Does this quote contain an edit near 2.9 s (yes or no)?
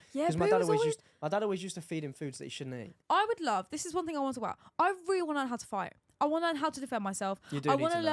yes